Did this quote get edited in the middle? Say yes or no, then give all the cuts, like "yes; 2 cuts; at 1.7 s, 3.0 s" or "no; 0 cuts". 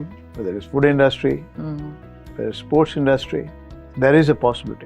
no; 0 cuts